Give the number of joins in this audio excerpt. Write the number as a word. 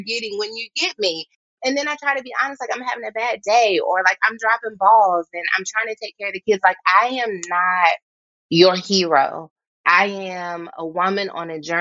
two